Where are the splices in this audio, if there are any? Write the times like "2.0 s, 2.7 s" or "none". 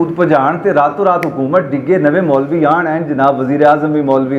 none